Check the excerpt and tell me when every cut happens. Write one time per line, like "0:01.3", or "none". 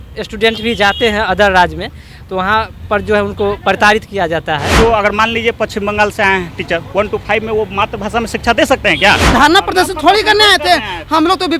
0:04.8
0:09.2